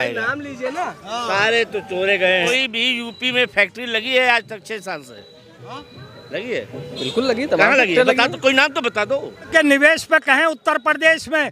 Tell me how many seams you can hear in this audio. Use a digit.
2